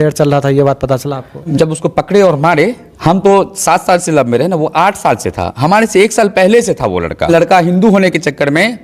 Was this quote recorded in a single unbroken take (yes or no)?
no